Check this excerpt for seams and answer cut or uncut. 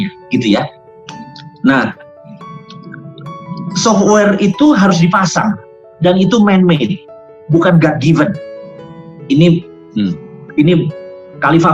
uncut